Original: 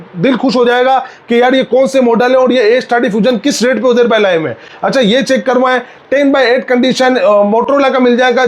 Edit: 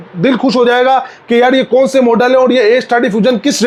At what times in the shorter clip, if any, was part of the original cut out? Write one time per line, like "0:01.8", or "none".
none